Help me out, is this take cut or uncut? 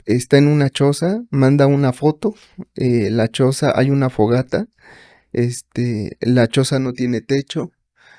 uncut